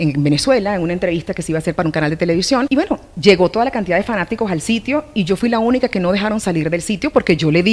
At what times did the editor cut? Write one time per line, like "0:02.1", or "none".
none